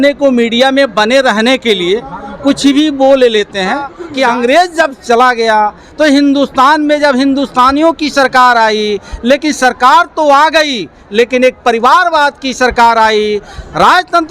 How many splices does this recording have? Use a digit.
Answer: 1